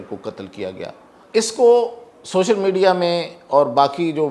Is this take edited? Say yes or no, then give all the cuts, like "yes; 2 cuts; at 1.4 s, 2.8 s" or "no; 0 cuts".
yes; 1 cut; at 1.2 s